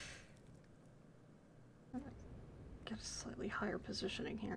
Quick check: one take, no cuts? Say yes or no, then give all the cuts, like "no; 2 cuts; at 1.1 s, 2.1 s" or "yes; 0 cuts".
no; 1 cut; at 1.9 s